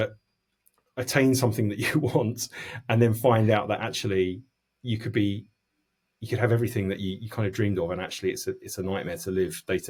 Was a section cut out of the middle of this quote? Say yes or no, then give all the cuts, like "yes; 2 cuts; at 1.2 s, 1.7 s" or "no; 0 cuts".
no; 0 cuts